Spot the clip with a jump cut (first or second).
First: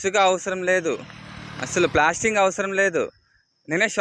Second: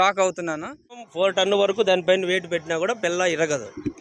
second